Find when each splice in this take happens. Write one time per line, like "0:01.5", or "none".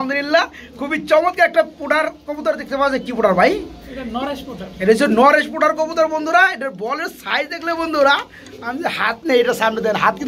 none